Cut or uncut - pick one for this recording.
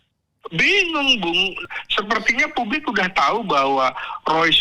cut